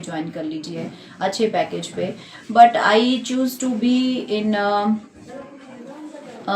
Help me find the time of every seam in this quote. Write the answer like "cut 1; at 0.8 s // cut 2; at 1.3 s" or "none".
none